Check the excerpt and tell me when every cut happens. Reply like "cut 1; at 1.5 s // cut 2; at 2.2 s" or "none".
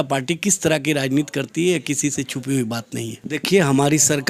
cut 1; at 3.2 s